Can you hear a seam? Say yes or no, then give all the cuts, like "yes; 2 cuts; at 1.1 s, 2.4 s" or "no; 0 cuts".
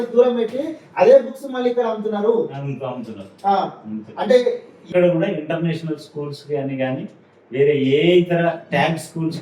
yes; 1 cut; at 4.9 s